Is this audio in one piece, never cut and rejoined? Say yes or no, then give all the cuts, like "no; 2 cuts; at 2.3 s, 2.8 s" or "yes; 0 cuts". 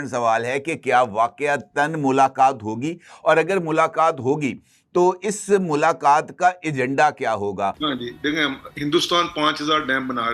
no; 1 cut; at 7.8 s